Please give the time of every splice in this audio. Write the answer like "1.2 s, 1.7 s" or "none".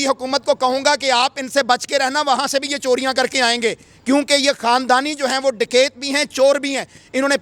none